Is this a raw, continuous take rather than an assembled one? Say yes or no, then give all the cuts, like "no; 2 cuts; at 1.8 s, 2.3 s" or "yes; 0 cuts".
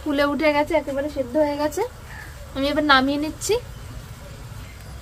yes; 0 cuts